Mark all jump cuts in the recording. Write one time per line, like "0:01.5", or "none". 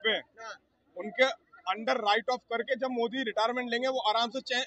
none